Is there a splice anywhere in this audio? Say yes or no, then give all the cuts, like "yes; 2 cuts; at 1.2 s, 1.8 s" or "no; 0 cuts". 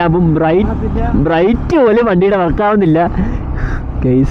no; 0 cuts